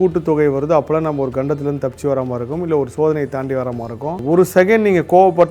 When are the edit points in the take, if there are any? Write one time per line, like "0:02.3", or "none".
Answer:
0:04.2

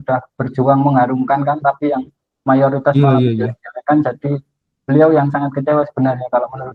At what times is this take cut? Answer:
none

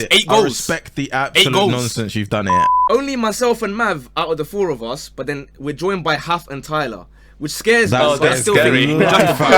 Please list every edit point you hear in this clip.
0:02.7

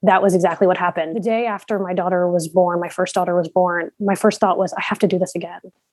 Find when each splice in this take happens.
0:01.1

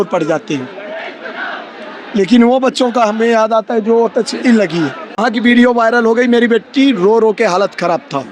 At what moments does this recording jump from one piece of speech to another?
0:05.2

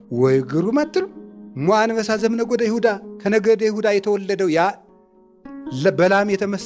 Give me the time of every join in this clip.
none

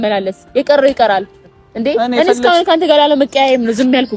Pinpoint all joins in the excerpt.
none

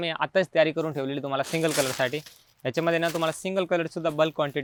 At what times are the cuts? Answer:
none

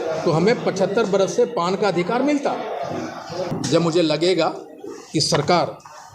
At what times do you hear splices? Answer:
0:03.5

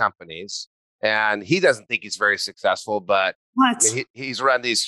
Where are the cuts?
none

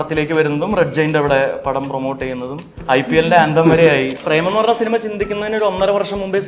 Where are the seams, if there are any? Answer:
0:02.8
0:04.2

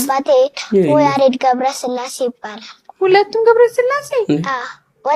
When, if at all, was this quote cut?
none

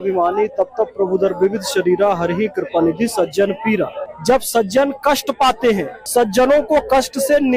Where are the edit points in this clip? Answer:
0:04.1
0:06.0

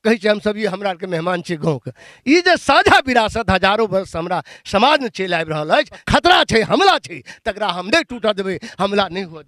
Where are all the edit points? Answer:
0:06.0

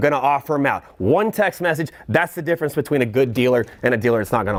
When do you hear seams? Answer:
none

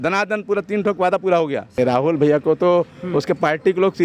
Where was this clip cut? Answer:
0:01.8

